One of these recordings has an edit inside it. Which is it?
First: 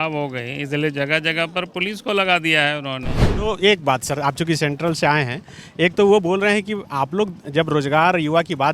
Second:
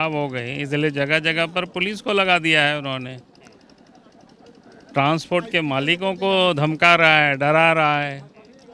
first; 1 cut; at 3.2 s

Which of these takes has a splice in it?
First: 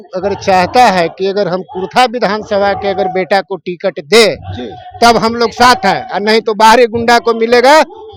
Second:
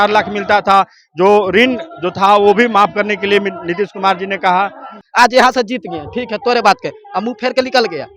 second; 1 cut; at 4.9 s

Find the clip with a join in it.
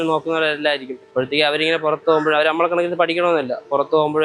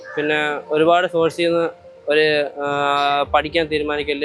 first; 1 cut; at 1.0 s

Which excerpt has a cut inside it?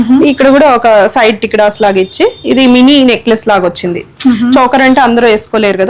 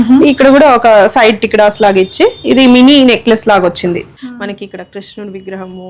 second; 1 cut; at 4.1 s

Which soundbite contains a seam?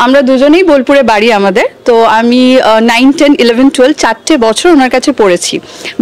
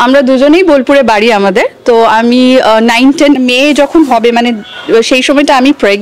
second; 1 cut; at 3.4 s

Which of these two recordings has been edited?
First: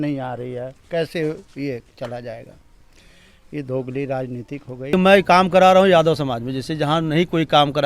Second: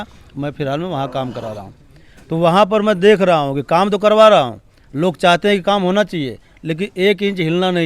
first; 1 cut; at 4.9 s

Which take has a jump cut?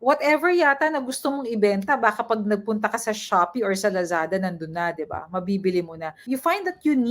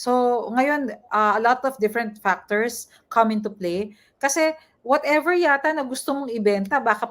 first; 1 cut; at 6.1 s

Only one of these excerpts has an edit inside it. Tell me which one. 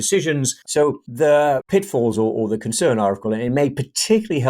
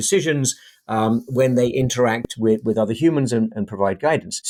first; 2 cuts; at 0.9 s, 3.2 s

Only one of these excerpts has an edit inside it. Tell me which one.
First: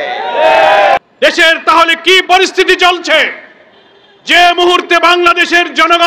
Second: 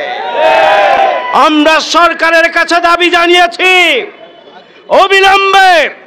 first; 1 cut; at 1.0 s

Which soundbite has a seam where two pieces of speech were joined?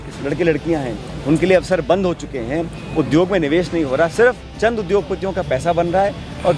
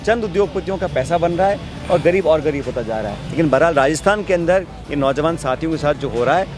second; 1 cut; at 3.2 s

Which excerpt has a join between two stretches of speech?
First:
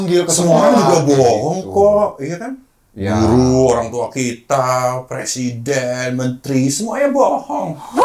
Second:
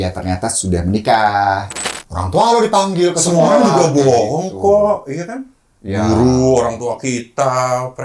second; 1 cut; at 1.8 s

